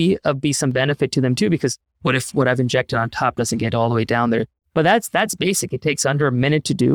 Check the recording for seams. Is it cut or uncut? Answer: cut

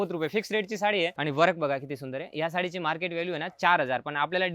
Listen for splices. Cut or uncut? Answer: cut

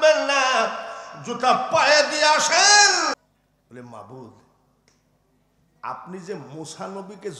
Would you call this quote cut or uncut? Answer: cut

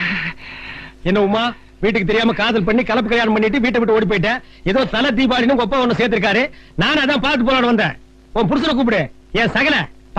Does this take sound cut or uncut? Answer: cut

